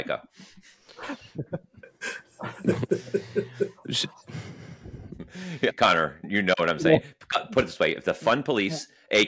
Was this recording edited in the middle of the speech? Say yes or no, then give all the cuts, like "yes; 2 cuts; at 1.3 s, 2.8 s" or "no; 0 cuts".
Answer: no; 0 cuts